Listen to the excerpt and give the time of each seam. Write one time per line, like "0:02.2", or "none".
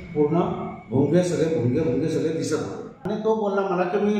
0:03.1